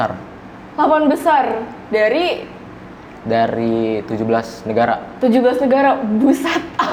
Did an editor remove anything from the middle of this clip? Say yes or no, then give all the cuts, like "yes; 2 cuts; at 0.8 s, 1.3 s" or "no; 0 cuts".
no; 0 cuts